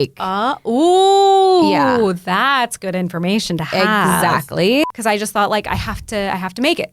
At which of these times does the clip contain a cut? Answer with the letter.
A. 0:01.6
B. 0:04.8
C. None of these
B